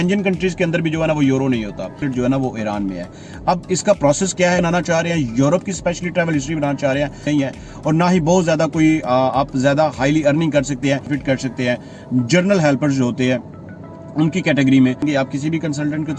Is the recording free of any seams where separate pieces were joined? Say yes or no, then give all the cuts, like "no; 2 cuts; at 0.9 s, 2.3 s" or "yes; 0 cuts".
no; 5 cuts; at 2.0 s, 4.6 s, 7.3 s, 11.1 s, 15.0 s